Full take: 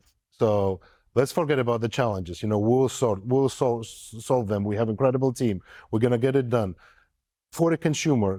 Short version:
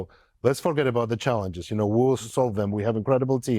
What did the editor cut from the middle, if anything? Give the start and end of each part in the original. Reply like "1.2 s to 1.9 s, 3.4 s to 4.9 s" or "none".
2.9 s to 4.1 s